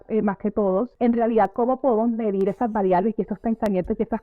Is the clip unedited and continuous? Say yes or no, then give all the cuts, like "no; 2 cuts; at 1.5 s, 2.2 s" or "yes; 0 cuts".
no; 1 cut; at 0.9 s